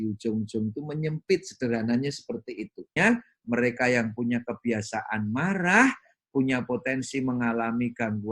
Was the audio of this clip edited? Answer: yes; 1 cut; at 3.0 s

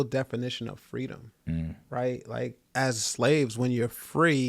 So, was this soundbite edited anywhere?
yes; 2 cuts; at 1.3 s, 2.6 s

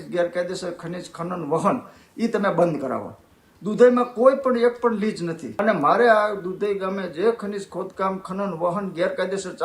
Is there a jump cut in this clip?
yes; 1 cut; at 5.4 s

